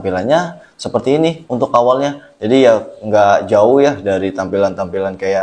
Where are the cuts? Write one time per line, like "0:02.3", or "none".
none